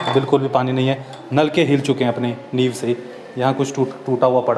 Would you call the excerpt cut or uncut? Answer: uncut